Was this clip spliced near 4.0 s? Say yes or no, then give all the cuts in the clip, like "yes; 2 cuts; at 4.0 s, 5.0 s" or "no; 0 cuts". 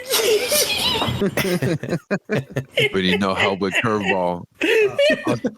no; 1 cut; at 1.1 s